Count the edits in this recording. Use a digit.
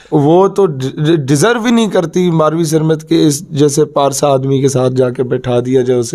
0